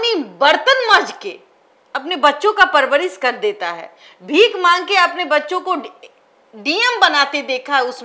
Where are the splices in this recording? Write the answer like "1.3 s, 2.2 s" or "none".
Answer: none